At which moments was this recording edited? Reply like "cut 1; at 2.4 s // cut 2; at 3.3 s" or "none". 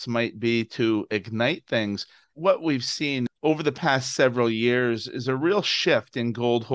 cut 1; at 2.3 s // cut 2; at 3.3 s